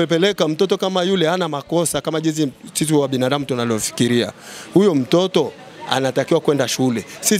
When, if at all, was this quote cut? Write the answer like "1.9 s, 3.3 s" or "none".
none